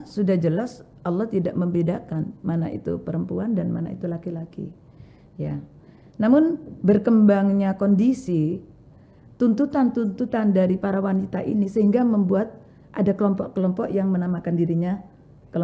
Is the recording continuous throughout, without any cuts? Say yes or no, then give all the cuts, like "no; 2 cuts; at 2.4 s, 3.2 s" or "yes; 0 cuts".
yes; 0 cuts